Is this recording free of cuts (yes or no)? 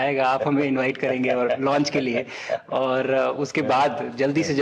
yes